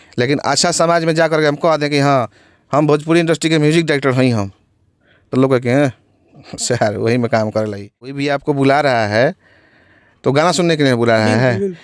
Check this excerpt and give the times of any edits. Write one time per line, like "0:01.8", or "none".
0:08.2